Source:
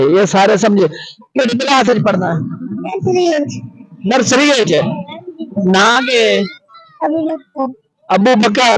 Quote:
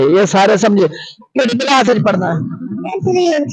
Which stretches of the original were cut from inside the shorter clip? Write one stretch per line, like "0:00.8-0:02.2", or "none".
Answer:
none